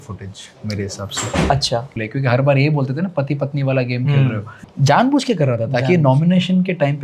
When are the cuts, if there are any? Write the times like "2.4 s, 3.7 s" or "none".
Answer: 1.9 s, 4.6 s